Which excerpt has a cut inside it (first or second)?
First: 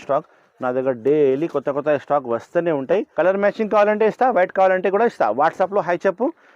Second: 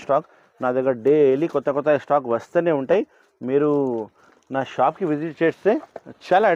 first